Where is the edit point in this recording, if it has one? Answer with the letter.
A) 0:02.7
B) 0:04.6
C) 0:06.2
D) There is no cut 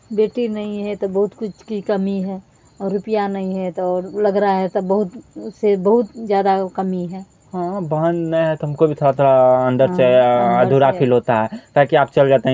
D